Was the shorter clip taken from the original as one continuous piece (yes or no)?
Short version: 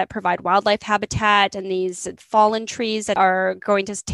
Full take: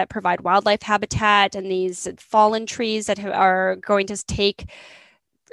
no